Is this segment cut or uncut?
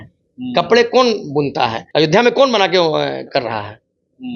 cut